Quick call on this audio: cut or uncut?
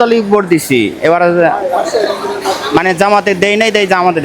uncut